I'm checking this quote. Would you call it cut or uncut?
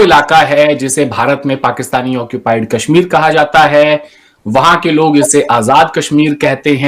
uncut